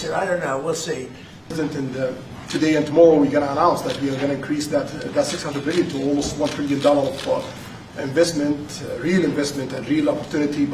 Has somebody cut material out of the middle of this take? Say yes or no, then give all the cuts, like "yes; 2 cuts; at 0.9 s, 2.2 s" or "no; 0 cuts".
yes; 1 cut; at 1.5 s